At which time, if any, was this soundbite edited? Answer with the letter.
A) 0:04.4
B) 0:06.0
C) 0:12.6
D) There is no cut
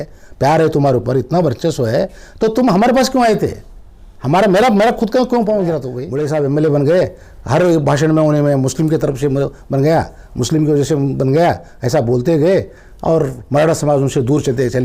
B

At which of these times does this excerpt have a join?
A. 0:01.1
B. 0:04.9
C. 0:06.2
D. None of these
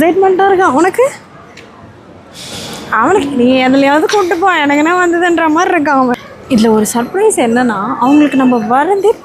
C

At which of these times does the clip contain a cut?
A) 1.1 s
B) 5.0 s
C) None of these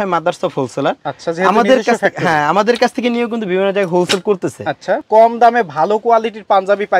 B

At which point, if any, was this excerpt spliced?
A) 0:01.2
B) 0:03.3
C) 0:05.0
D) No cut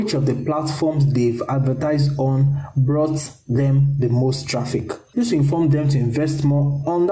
C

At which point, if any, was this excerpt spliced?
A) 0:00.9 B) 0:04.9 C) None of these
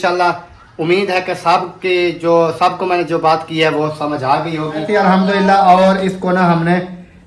B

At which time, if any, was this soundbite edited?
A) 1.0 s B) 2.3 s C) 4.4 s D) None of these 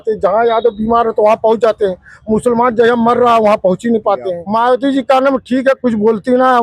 C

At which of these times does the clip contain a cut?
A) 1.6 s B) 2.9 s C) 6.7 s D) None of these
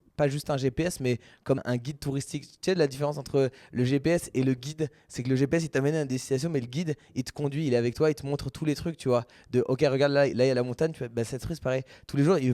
A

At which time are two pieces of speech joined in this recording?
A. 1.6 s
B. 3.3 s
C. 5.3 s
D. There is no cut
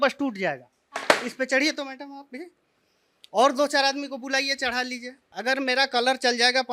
C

